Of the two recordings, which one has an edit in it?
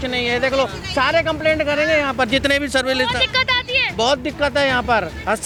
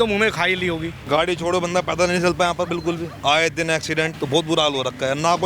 second; 3 cuts; at 0.9 s, 3.1 s, 4.1 s

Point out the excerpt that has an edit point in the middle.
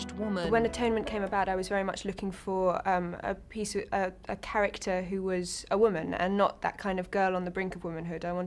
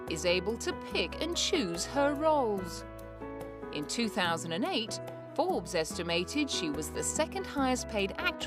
second; 1 cut; at 5.5 s

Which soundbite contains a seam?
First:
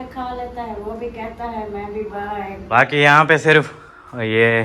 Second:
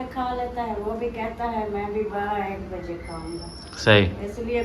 first; 1 cut; at 2.6 s

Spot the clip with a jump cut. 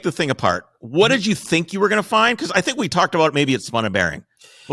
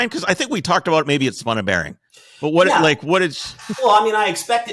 second; 1 cut; at 3.4 s

